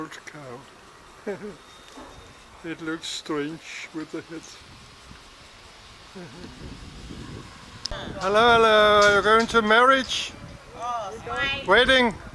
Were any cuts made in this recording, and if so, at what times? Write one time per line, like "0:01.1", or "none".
0:07.8